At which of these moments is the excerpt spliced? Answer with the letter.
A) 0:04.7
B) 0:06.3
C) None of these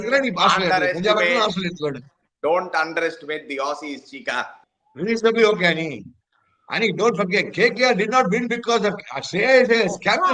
A